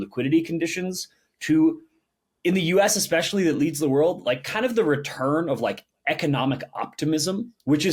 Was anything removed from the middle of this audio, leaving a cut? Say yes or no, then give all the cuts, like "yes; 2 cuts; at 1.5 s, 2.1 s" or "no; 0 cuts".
no; 0 cuts